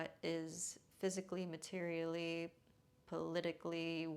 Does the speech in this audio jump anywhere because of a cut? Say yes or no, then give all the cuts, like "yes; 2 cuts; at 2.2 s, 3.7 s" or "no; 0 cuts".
no; 0 cuts